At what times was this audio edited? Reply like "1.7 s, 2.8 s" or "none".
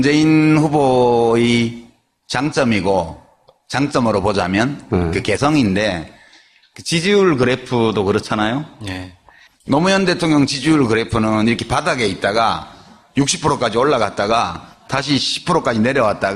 2.2 s